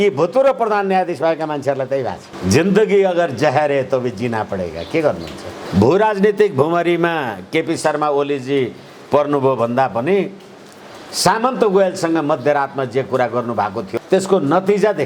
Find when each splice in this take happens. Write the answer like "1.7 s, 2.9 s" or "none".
2.3 s, 5.5 s, 13.9 s

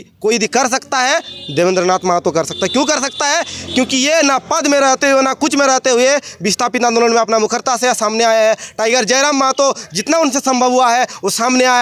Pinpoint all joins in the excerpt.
none

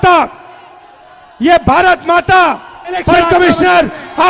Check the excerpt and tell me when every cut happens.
3.1 s

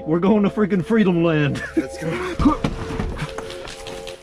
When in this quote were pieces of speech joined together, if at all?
2.3 s

